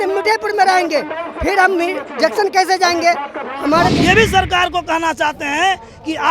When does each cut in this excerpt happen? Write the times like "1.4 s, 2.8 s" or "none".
3.9 s

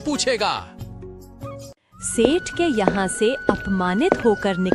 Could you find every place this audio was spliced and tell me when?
none

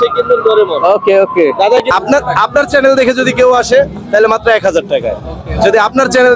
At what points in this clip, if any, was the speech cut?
1.9 s

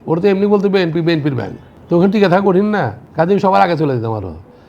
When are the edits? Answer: 3.0 s

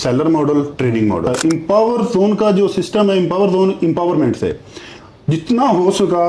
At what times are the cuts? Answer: 1.3 s

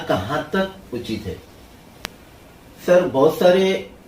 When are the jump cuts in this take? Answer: 2.0 s

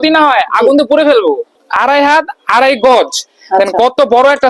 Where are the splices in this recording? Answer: 1.6 s

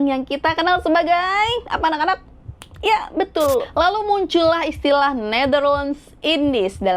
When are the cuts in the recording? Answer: 3.7 s

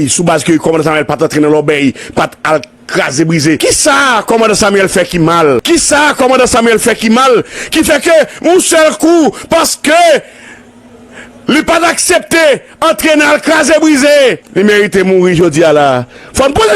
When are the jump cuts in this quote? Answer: 3.6 s, 5.6 s, 14.4 s

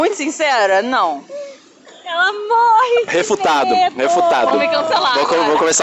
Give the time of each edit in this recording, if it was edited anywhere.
none

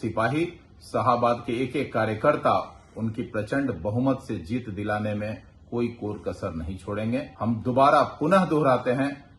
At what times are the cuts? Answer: 7.3 s

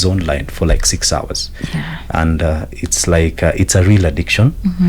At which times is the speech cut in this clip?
none

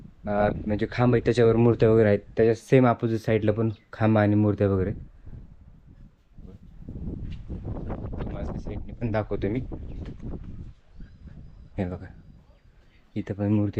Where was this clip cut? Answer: none

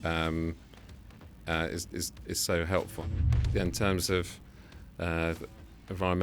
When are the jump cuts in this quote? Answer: 3.2 s

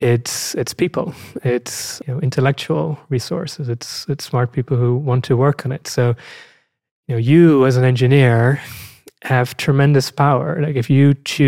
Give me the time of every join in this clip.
2.0 s

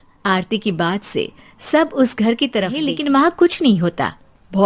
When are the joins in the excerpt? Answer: 2.9 s

